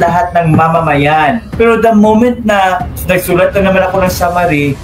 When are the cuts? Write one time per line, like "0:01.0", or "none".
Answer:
0:01.5
0:02.9